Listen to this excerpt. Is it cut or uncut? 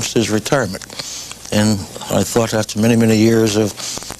uncut